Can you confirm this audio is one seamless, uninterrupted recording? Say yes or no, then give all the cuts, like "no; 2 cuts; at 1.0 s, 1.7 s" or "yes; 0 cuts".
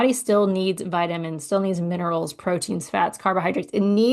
yes; 0 cuts